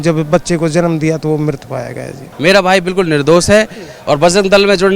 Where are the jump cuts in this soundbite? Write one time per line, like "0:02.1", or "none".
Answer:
0:02.3